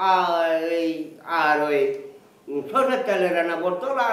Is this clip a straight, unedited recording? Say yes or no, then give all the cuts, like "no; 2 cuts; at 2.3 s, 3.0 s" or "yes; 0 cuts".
yes; 0 cuts